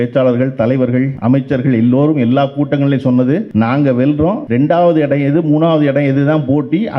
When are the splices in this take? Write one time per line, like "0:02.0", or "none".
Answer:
0:01.1
0:03.5
0:04.4